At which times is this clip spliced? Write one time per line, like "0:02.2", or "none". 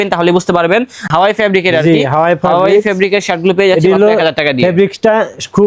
0:01.1

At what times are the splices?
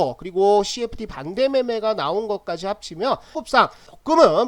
0:03.3

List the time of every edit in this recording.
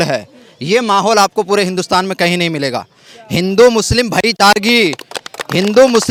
none

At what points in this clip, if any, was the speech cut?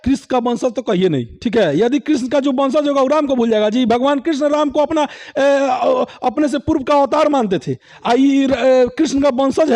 none

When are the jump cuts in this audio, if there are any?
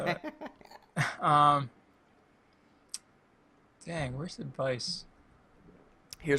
0:05.2

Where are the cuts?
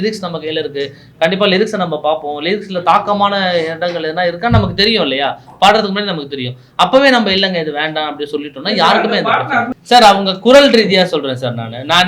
0:09.8

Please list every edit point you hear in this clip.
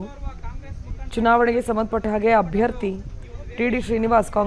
0:03.4

